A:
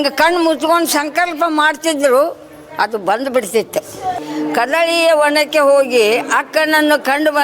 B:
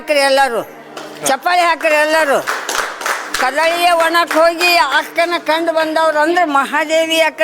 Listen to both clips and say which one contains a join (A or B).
A